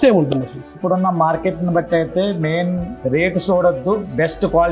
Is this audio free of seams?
no; 2 cuts; at 0.8 s, 2.9 s

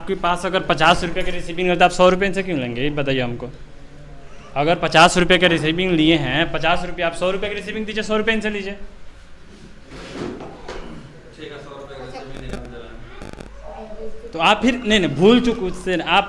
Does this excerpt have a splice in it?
no; 0 cuts

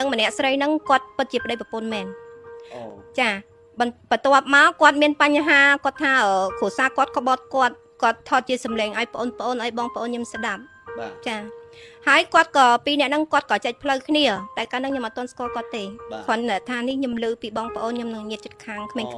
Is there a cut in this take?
no; 0 cuts

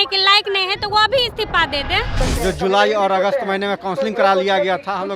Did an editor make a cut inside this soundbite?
yes; 1 cut; at 2.2 s

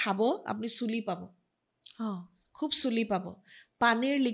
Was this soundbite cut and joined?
no; 0 cuts

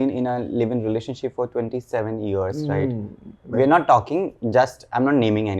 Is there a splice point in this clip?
no; 0 cuts

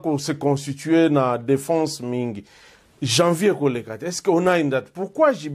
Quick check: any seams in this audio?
no; 0 cuts

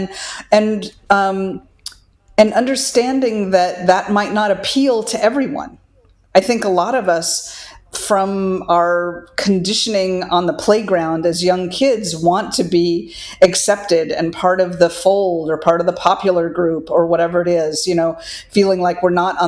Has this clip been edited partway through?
no; 0 cuts

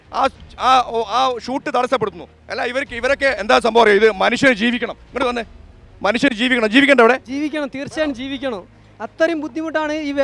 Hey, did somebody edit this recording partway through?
no; 0 cuts

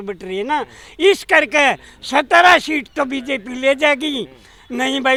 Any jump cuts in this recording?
no; 0 cuts

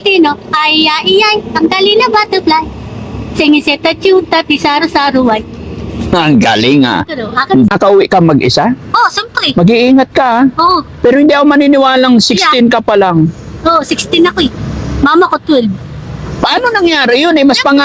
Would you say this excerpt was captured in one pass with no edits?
no; 1 cut; at 7.7 s

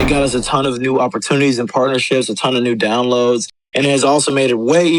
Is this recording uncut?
yes; 0 cuts

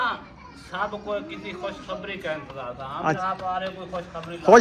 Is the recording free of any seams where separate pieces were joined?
no; 1 cut; at 3.2 s

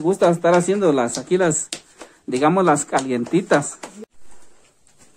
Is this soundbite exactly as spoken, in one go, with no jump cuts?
no; 1 cut; at 4.0 s

